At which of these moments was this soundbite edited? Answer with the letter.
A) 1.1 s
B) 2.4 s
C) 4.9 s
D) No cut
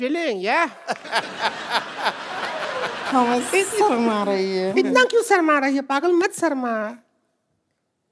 B